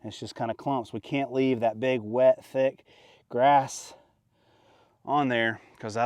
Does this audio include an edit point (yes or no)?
no